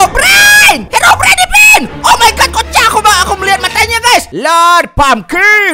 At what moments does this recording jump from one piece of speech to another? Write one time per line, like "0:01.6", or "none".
0:04.3